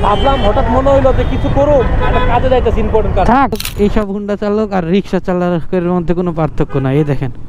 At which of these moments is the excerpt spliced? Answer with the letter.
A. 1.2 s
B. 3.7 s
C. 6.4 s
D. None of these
B